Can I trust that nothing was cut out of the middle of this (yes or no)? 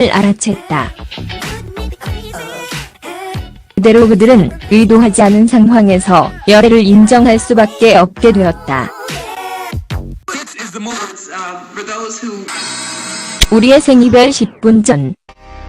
no